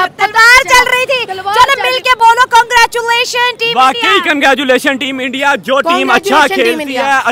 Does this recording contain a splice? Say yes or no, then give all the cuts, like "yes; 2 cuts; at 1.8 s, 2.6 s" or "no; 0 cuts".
no; 0 cuts